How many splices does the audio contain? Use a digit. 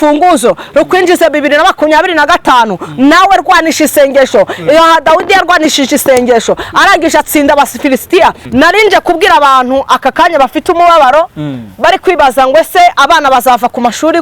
1